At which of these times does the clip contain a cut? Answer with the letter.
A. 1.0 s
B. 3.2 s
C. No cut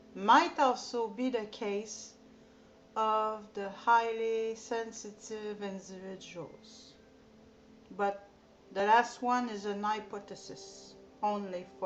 A